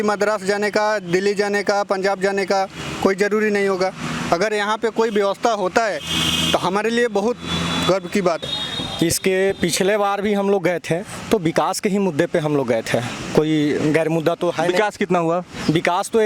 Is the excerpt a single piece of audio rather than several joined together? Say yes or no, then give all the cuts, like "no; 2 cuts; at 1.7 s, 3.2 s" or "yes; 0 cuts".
no; 1 cut; at 8.4 s